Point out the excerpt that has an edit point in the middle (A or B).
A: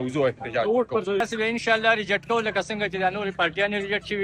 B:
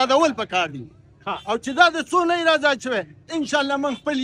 A